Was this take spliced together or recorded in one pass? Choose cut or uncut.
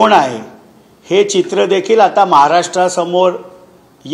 uncut